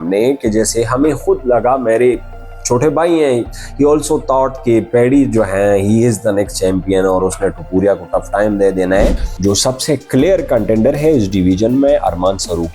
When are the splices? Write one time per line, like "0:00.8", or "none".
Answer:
0:09.2

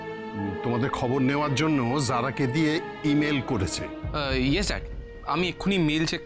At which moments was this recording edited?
0:04.1

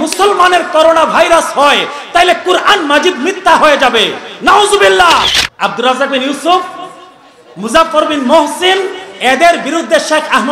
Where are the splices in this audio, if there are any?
0:05.4

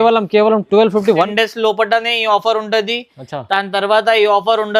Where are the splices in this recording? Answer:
0:01.3

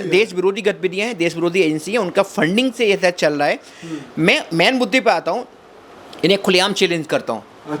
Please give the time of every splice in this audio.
none

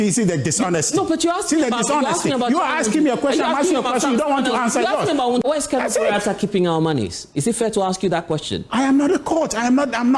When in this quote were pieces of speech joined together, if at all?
0:05.4

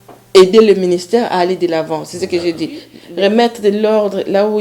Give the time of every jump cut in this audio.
0:03.0

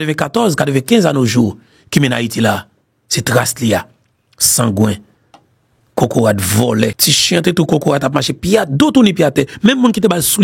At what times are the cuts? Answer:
0:07.1

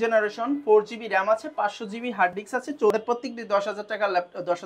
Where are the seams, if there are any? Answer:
0:03.0

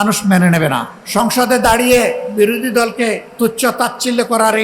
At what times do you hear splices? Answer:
0:01.0
0:03.3

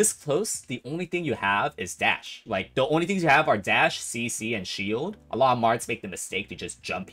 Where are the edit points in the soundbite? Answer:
0:02.4

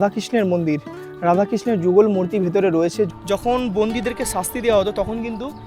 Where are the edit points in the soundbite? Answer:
0:03.1

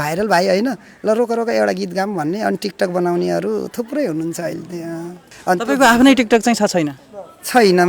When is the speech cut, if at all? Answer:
0:05.3

